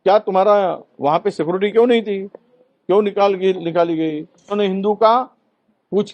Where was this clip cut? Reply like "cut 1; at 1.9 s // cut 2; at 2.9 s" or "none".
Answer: cut 1; at 4.5 s